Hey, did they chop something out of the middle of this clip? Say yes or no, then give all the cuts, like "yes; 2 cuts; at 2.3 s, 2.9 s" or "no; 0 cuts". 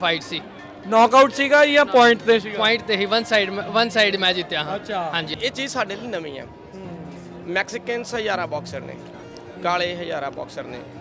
yes; 1 cut; at 5.3 s